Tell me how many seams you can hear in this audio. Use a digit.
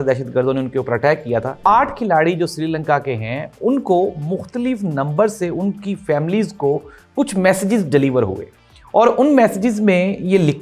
1